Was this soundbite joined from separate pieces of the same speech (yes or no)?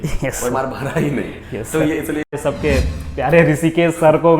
yes